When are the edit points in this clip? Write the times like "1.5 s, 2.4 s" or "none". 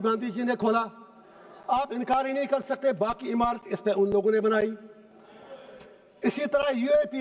none